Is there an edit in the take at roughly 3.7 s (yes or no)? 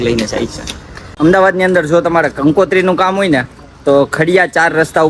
no